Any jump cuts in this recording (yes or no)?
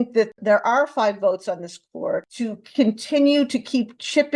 yes